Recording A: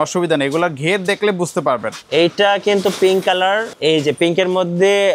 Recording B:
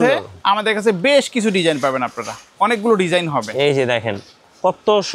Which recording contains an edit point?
A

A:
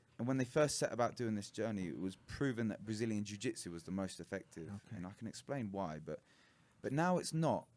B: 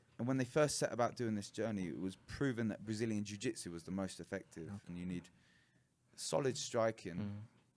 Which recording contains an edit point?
B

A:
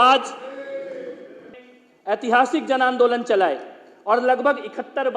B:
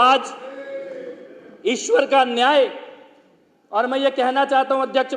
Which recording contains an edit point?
A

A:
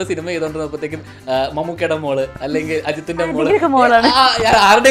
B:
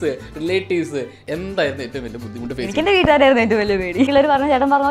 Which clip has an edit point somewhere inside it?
B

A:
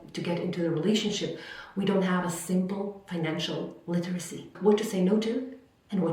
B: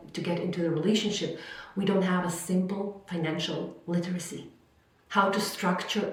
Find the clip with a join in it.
A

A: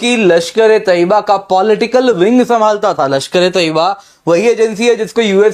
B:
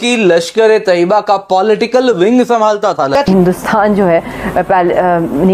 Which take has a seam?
B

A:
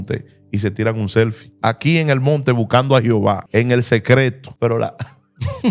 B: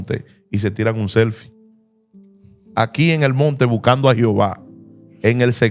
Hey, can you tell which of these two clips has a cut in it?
A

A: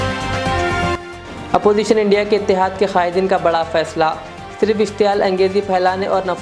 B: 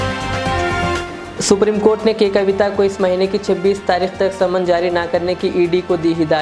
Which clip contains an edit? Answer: B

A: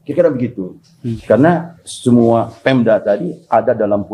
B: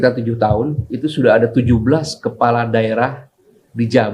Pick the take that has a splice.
A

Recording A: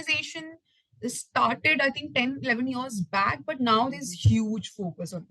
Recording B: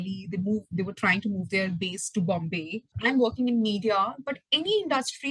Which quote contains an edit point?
B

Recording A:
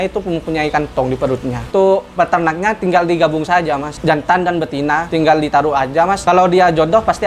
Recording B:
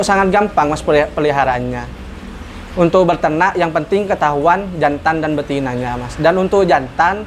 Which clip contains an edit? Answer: A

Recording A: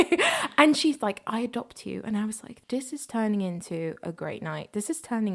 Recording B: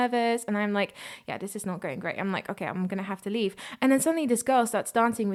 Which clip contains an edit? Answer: A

